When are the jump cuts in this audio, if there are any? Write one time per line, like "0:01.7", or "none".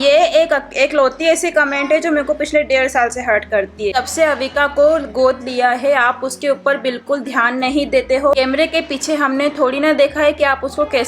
0:03.9
0:08.4